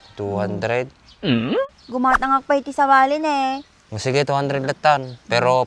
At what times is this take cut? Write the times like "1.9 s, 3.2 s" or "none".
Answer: 1.8 s